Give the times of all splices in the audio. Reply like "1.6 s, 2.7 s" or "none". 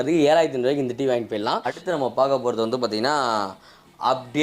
1.7 s